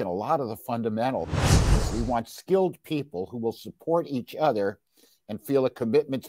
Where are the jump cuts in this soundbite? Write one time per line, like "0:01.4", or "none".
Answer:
0:01.6